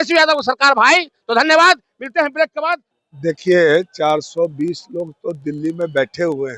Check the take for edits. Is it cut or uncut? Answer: cut